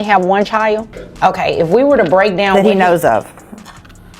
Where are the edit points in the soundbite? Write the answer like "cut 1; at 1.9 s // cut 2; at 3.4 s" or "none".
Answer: cut 1; at 1.0 s

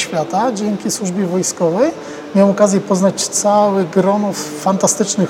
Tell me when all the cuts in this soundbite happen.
none

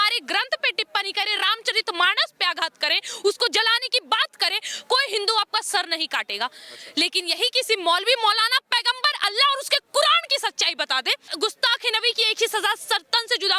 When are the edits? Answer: cut 1; at 11.3 s

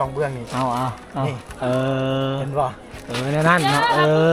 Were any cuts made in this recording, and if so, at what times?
none

